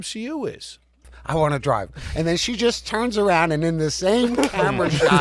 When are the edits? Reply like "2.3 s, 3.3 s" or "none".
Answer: 1.1 s